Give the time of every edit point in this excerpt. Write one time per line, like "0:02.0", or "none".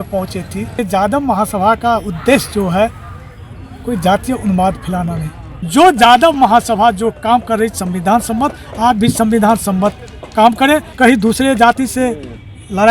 0:00.8
0:05.5
0:10.9